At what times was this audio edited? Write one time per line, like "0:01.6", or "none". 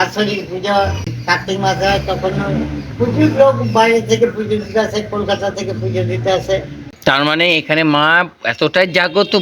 0:01.1
0:06.7